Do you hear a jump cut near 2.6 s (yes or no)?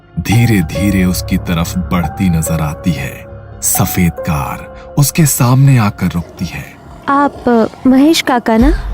no